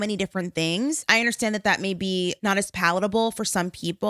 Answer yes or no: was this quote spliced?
yes